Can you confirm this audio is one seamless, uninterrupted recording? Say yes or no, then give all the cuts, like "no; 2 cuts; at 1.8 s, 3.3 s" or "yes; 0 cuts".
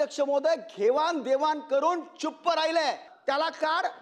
no; 1 cut; at 3.1 s